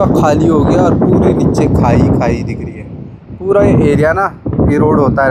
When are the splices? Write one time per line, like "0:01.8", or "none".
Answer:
none